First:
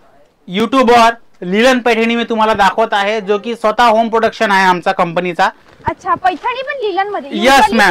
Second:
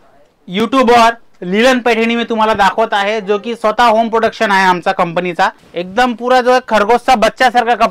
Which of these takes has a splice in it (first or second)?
second